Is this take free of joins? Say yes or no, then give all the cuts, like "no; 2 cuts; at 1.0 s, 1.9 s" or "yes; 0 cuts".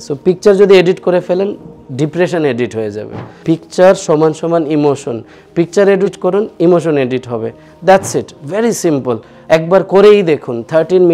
no; 3 cuts; at 3.3 s, 6.2 s, 9.3 s